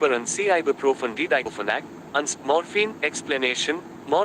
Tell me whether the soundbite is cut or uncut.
cut